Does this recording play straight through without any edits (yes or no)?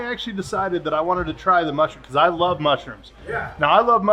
yes